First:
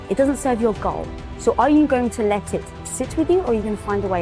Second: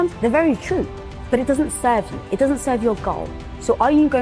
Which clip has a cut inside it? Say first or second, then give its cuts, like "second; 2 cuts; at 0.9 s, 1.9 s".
second; 1 cut; at 1.2 s